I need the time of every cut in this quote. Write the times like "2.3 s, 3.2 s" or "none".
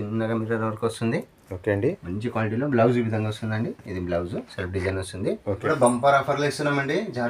5.6 s